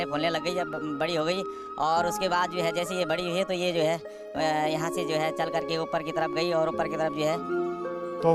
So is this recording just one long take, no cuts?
no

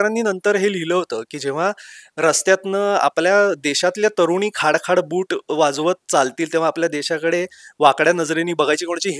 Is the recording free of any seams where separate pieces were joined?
yes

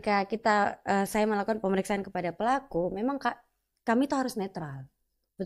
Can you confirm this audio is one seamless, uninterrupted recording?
yes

